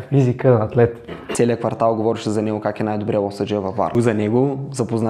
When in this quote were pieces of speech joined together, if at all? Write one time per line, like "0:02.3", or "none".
0:01.2
0:04.0